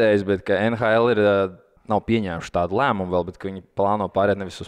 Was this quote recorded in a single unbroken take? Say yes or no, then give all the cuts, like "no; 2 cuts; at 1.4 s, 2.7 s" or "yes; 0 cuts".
no; 1 cut; at 1.7 s